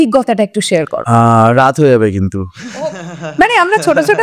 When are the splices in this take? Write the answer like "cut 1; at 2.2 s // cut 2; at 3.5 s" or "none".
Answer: cut 1; at 1.0 s

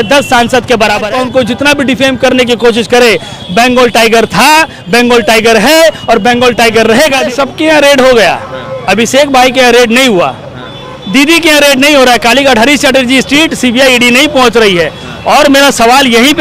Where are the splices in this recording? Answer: cut 1; at 1.1 s // cut 2; at 7.3 s

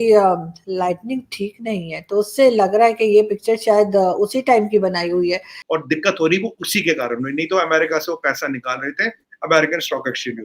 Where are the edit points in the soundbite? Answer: cut 1; at 5.6 s

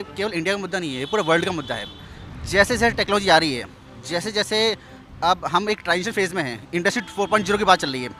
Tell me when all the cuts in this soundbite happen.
none

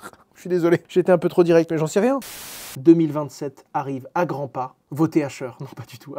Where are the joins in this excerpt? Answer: cut 1; at 2.4 s

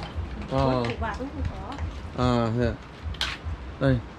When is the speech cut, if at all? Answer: none

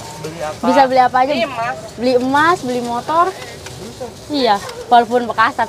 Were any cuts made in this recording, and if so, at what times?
none

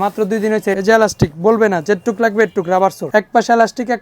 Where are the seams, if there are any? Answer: cut 1; at 0.8 s // cut 2; at 3.1 s

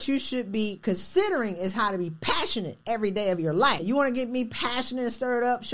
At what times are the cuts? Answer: cut 1; at 3.8 s

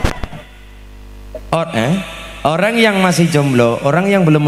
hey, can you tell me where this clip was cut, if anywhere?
none

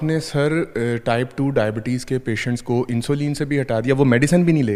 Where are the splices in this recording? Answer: none

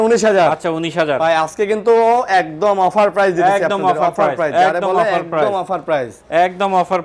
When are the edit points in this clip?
none

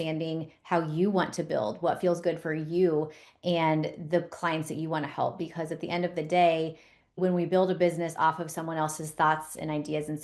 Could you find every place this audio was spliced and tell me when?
cut 1; at 7.2 s

